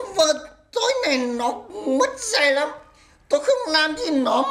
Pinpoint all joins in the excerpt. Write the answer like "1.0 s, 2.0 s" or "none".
none